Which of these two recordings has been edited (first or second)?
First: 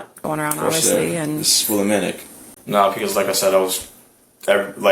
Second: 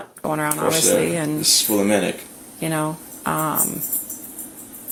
first